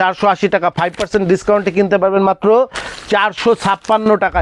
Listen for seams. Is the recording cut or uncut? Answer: uncut